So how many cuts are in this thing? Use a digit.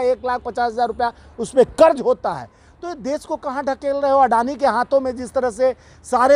0